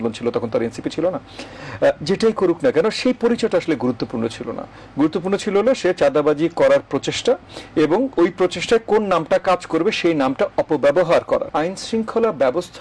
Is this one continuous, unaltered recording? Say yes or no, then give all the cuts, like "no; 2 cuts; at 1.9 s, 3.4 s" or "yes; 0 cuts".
no; 1 cut; at 11.5 s